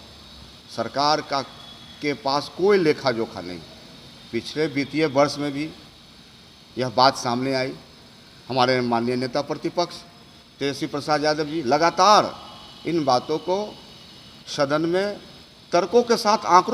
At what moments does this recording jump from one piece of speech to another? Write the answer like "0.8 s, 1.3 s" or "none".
none